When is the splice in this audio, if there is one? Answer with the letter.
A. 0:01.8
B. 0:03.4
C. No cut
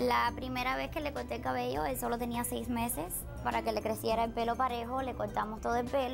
B